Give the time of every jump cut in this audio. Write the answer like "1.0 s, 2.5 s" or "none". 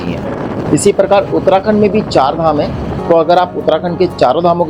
3.0 s